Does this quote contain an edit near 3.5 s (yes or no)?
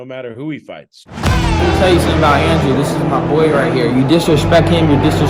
no